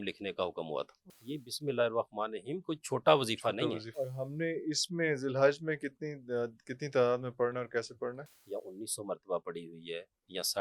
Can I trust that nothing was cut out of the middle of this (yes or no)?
no